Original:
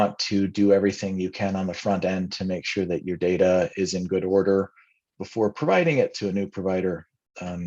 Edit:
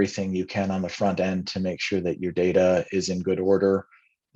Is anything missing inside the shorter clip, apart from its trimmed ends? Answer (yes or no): no